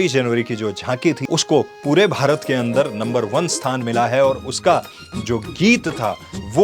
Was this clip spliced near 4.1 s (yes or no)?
no